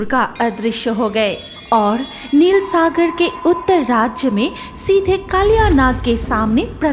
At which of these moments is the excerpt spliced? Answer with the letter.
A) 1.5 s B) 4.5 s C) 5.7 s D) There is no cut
A